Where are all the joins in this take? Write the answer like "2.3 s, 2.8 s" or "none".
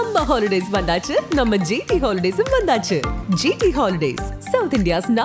none